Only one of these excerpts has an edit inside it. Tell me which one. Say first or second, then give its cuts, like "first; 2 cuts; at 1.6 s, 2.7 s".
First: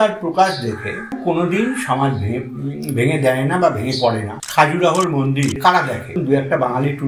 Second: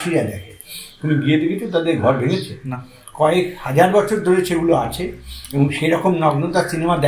first; 3 cuts; at 1.1 s, 4.3 s, 5.8 s